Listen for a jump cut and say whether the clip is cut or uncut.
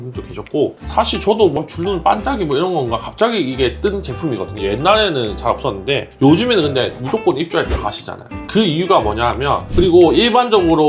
cut